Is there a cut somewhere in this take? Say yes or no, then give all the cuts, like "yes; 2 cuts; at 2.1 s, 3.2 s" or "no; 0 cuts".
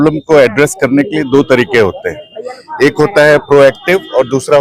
no; 0 cuts